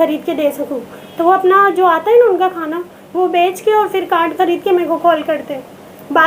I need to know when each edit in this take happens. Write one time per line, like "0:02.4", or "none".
none